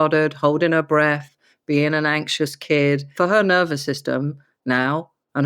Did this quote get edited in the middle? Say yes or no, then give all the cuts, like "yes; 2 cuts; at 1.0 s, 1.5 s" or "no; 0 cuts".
yes; 1 cut; at 3.1 s